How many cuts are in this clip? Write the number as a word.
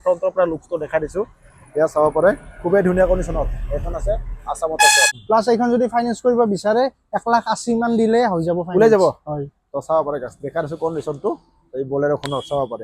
one